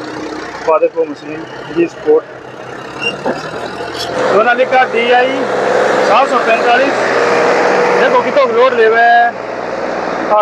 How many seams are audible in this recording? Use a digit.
1